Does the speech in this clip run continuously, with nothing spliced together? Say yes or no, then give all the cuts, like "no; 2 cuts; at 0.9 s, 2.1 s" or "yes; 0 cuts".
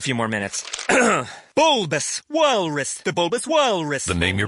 yes; 0 cuts